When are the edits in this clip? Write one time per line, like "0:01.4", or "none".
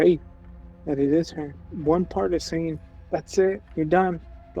0:01.7